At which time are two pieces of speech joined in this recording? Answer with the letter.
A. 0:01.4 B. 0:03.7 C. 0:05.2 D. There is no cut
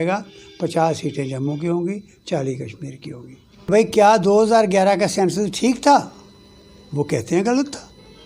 B